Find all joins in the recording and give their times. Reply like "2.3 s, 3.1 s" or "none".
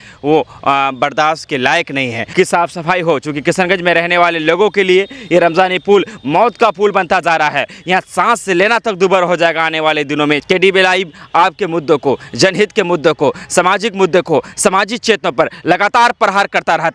2.3 s, 10.4 s